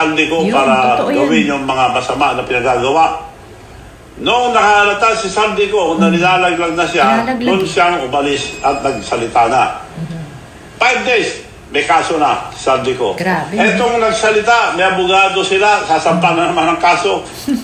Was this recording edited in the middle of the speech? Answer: no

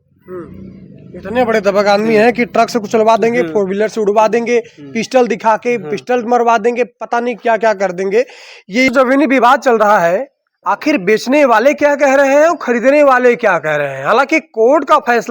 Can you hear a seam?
yes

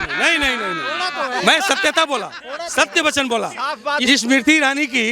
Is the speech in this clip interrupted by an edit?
no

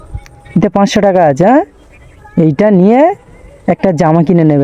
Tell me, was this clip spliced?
no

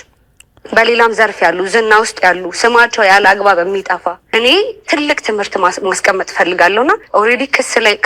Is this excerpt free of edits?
no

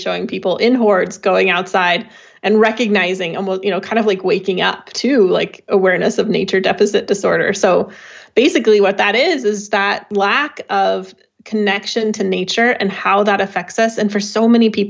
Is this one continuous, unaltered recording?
no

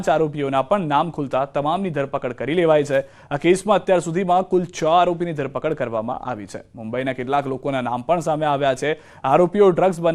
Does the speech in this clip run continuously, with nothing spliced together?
yes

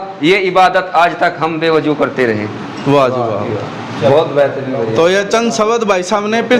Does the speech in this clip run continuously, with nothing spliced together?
yes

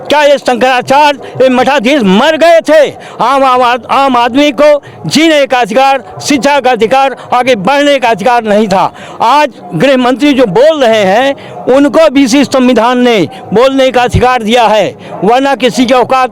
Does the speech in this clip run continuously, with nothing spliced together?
yes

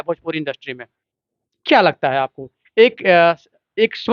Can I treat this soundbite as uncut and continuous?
yes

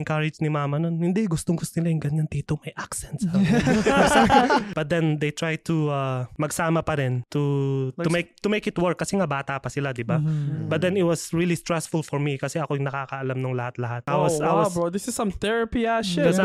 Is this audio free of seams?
no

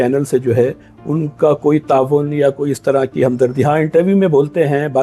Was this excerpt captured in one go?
yes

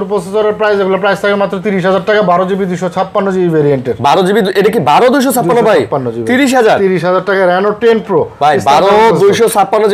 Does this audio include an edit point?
no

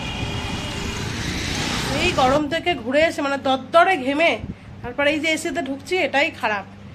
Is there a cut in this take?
yes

